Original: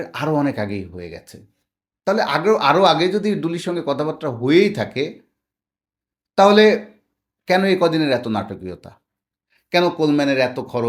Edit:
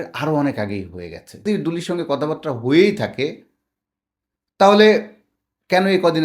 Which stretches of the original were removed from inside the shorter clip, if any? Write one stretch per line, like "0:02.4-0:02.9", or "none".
0:01.4-0:03.2